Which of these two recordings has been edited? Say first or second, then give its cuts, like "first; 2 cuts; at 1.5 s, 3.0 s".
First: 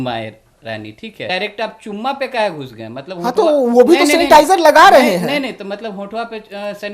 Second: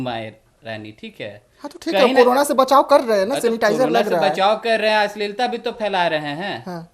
first; 1 cut; at 1.3 s